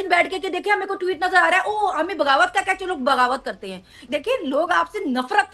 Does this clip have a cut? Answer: yes; 1 cut; at 4.0 s

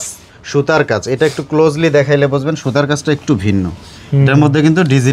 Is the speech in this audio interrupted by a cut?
no; 0 cuts

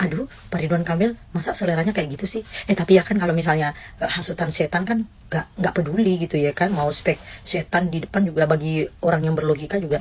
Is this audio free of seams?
yes; 0 cuts

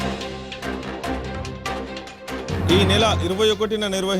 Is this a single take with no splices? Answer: no; 1 cut; at 1.0 s

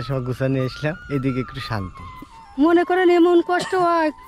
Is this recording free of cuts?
no; 2 cuts; at 1.0 s, 2.4 s

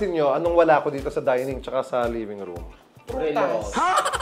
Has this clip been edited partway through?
no; 0 cuts

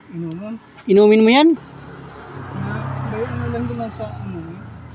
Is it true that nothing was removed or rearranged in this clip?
no; 1 cut; at 1.7 s

